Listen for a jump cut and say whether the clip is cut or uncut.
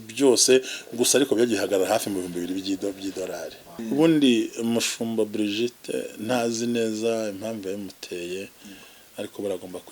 cut